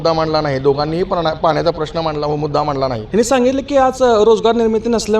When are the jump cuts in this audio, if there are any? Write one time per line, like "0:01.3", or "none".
0:03.0